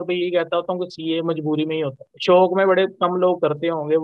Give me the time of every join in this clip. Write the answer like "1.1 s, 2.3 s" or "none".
2.1 s